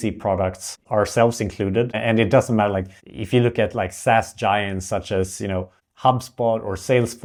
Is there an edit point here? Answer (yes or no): no